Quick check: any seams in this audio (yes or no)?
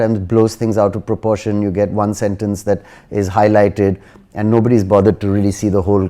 no